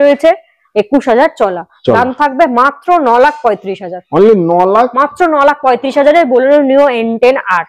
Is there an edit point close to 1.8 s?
no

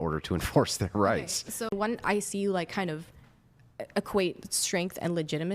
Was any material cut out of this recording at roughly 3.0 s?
no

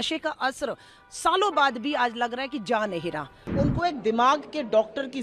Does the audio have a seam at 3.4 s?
yes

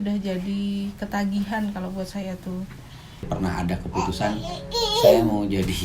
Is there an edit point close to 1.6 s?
no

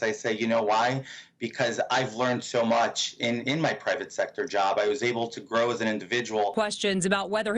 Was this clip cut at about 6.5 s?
yes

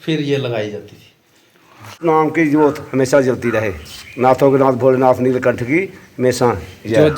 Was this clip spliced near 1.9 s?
yes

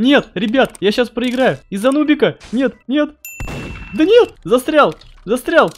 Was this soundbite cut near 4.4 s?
yes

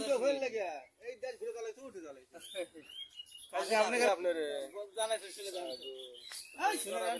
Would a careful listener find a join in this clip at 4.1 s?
yes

